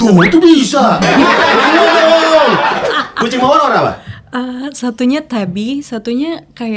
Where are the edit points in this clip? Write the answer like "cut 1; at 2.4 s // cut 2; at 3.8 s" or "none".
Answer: cut 1; at 2.9 s